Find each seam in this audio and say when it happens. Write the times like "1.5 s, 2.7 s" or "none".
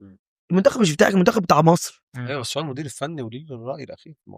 none